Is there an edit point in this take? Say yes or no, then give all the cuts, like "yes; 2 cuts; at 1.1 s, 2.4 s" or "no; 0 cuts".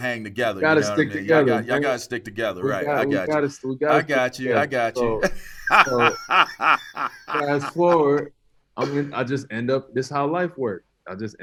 no; 0 cuts